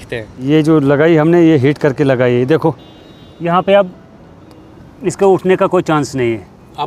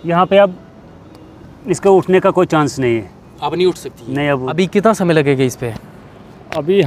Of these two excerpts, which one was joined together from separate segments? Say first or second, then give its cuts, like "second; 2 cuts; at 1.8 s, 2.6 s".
second; 1 cut; at 4.6 s